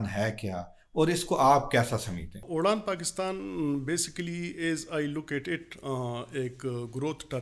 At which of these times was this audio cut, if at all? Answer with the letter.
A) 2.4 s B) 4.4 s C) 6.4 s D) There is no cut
A